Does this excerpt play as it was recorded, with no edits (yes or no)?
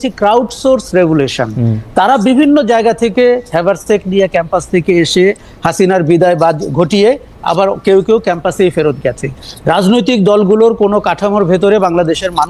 yes